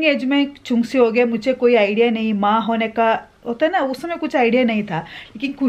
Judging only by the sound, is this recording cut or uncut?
uncut